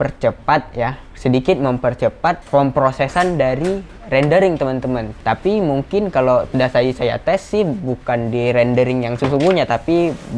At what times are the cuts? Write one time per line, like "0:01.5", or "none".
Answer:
0:02.4
0:05.1
0:09.2